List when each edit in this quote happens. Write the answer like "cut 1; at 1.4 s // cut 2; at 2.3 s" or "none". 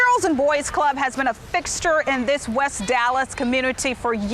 none